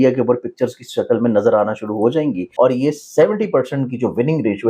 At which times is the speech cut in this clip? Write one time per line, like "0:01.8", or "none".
0:02.4